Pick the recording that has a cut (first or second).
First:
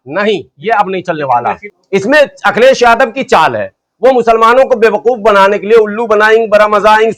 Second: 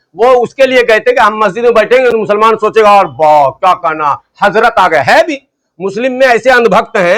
first